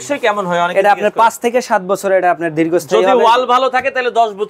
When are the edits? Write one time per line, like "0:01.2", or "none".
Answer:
none

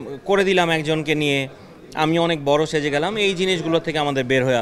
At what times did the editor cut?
none

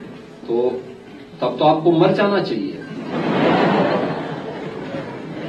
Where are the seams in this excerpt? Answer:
none

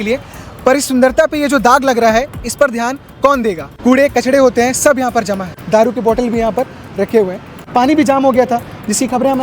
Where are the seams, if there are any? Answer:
0:03.7
0:05.5
0:07.7

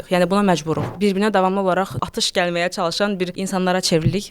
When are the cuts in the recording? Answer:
0:00.9
0:02.0
0:03.4

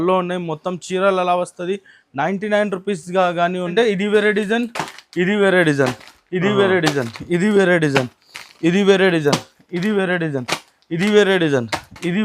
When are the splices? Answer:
0:03.7

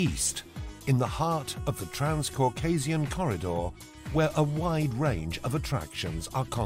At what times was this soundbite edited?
0:05.7

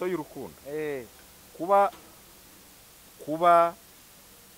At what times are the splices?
none

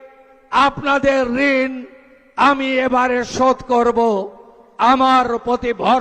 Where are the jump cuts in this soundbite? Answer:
none

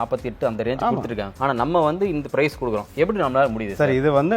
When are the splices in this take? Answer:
none

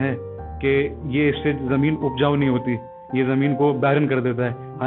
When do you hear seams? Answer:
none

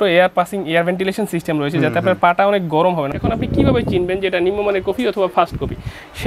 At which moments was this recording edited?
0:03.1

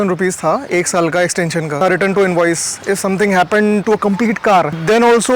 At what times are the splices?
0:01.8

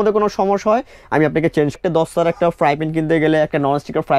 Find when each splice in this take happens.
0:01.8

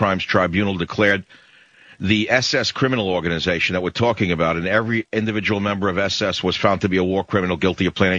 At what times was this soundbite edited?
none

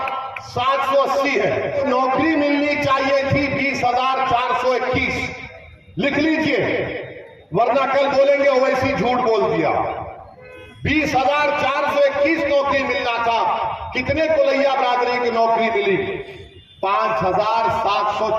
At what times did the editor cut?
0:01.8

